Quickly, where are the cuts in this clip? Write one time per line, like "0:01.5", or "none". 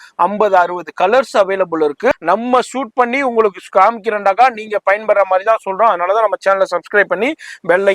0:02.1